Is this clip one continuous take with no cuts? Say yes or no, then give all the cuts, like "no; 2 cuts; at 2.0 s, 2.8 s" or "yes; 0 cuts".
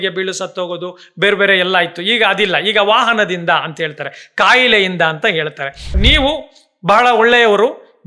no; 1 cut; at 5.9 s